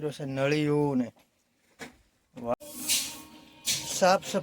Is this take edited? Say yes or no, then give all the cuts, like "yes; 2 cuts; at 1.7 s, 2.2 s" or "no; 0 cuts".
yes; 1 cut; at 2.5 s